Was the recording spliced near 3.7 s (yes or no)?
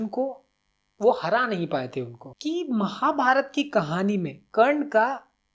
no